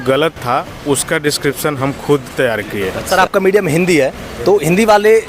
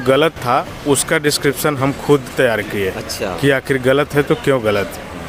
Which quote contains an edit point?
first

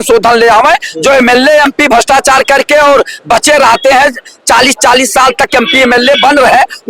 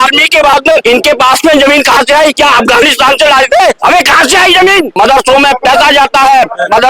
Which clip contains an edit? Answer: second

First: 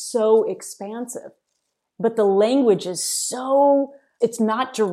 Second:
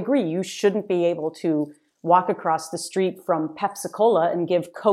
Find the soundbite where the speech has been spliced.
first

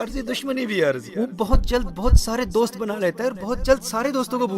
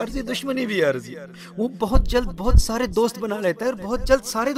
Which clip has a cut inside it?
first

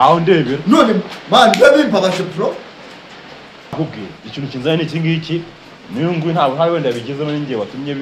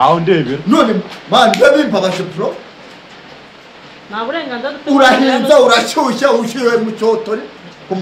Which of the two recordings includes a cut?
first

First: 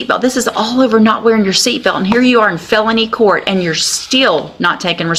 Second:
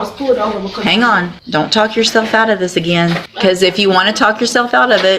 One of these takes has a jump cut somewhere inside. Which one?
second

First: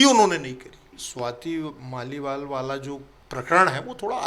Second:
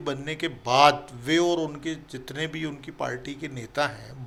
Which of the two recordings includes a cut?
first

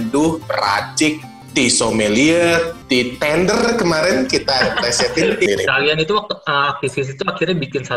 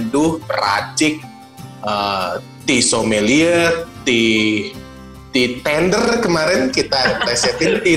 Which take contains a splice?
first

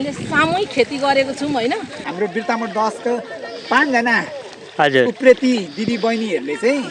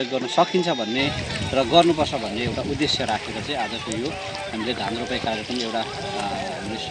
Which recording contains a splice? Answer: first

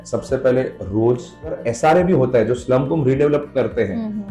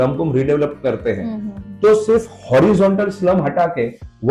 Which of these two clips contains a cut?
first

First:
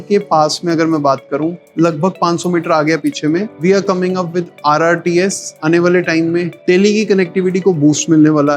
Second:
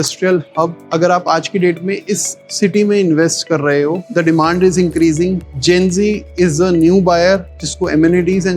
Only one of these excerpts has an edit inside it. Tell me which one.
second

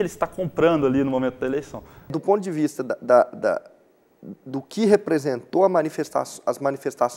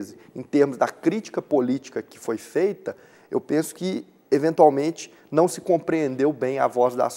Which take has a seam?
first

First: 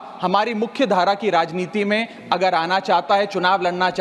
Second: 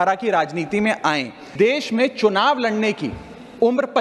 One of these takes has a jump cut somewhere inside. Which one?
second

